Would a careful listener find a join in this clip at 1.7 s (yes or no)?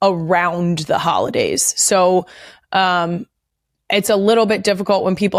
no